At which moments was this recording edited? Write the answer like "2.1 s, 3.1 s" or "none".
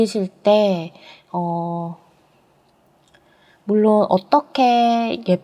none